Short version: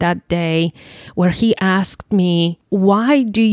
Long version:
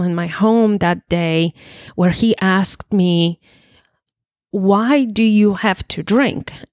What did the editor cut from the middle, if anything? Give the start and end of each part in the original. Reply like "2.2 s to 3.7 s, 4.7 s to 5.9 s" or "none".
3.4 s to 4.4 s